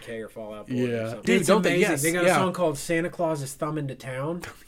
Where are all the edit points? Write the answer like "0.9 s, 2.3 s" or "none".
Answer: 1.2 s